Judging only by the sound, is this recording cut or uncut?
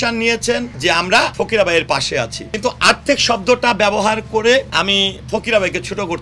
cut